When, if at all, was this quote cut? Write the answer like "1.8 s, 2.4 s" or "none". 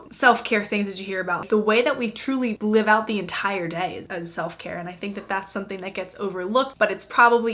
1.4 s, 4.0 s, 6.7 s